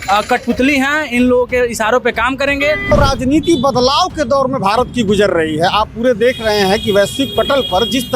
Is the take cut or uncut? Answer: cut